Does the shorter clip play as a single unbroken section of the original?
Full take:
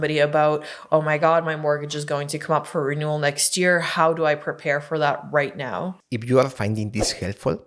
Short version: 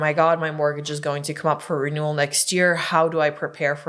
yes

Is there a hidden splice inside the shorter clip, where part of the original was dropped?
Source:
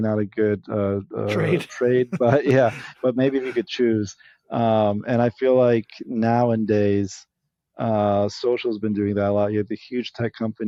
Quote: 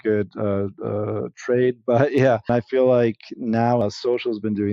yes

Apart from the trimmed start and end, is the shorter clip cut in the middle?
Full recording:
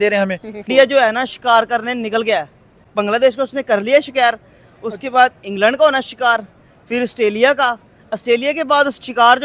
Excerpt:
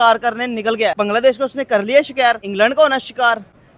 yes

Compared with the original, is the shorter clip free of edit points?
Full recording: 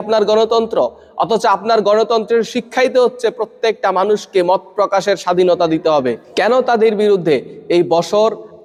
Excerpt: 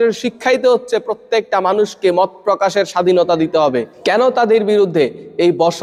yes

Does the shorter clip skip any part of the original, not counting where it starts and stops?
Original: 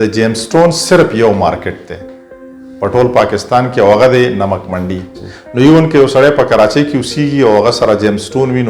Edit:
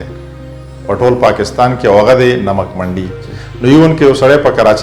no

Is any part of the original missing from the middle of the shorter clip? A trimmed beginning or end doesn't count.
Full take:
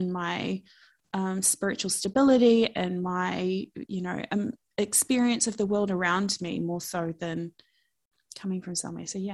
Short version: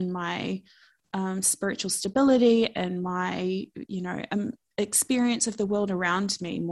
no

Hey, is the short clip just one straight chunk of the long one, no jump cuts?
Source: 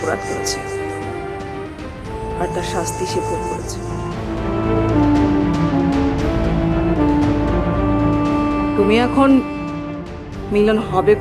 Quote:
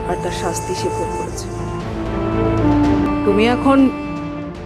no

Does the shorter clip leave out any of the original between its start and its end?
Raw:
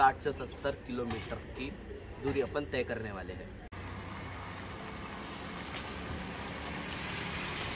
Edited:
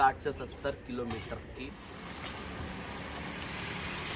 yes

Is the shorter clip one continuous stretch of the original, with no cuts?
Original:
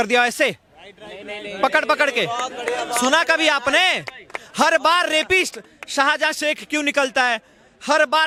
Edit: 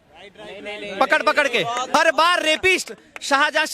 no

